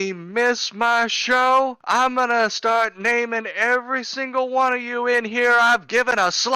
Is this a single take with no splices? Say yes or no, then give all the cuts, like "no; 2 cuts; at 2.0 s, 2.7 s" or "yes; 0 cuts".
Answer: yes; 0 cuts